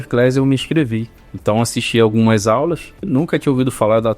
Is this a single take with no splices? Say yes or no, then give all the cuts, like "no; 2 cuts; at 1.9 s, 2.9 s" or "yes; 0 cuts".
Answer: no; 1 cut; at 3.1 s